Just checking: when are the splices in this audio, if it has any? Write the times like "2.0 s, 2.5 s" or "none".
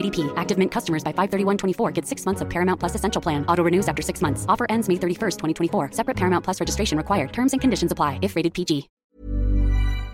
8.9 s